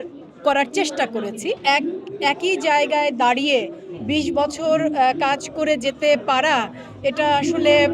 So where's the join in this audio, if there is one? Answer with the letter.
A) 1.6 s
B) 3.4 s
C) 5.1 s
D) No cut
A